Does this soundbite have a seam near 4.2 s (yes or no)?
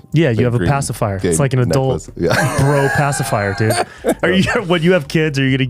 yes